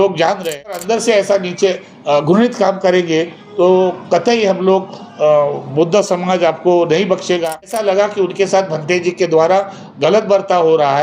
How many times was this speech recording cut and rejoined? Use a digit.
2